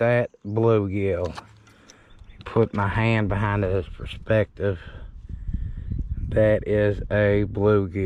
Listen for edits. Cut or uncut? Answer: uncut